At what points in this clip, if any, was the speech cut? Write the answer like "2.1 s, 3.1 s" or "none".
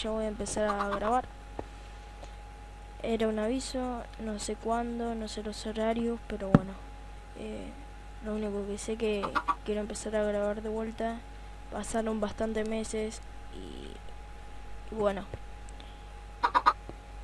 7.5 s